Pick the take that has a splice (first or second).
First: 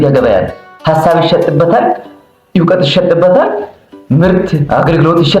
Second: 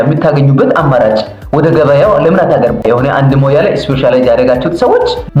first